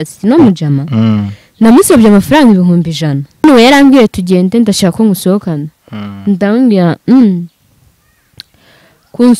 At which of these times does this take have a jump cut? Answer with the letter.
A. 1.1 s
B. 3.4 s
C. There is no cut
B